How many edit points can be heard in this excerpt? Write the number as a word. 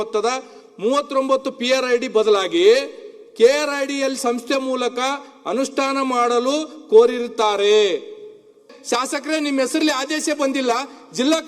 one